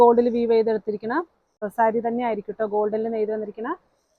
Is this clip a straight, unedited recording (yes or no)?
no